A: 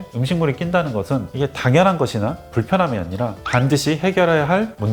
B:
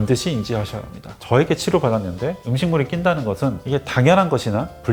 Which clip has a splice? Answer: B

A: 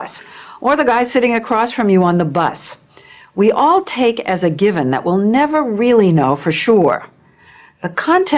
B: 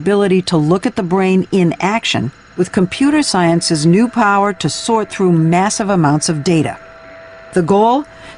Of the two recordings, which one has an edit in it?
B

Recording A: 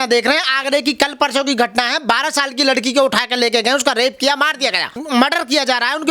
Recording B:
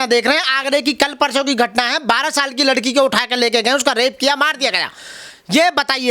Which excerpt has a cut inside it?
A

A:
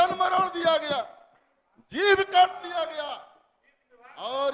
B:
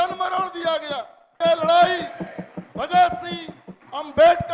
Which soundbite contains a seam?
B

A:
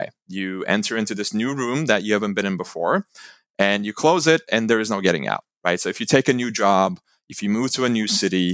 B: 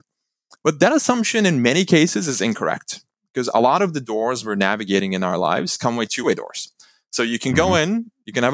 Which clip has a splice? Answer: B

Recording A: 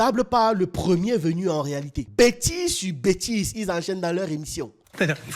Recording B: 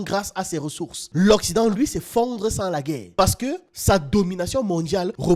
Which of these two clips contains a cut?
A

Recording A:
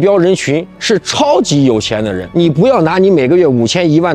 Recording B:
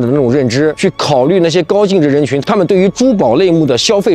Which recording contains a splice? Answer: A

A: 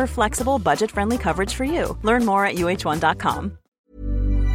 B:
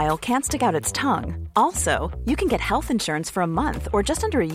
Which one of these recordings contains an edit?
A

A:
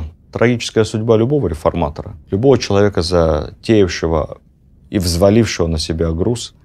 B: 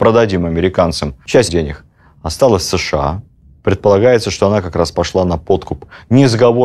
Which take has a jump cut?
B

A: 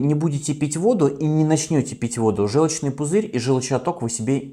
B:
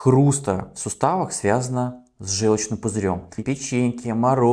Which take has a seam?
B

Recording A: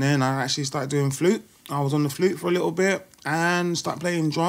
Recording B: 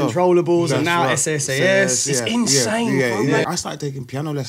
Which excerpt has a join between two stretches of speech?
B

